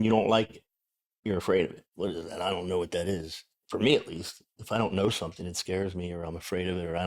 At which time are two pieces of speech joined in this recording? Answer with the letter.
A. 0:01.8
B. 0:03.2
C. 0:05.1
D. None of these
A